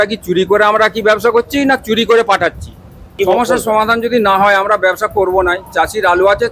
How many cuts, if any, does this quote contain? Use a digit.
1